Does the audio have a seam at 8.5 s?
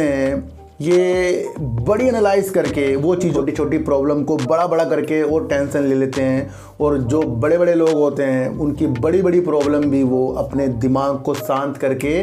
no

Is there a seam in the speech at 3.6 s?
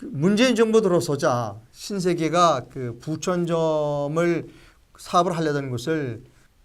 yes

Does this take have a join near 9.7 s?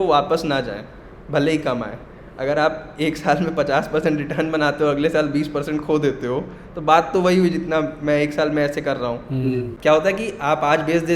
yes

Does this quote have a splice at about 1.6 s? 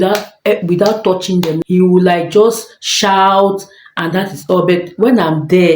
yes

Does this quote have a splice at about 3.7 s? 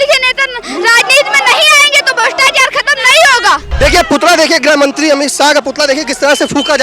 yes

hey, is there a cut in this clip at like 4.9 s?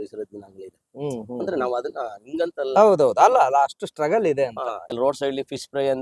yes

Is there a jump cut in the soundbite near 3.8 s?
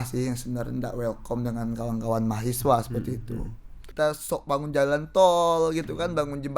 yes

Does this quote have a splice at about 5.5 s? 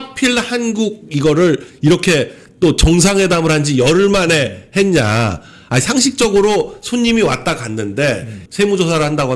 no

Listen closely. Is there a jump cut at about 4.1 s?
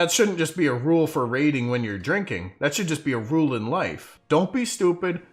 yes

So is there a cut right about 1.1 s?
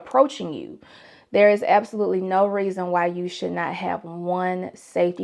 yes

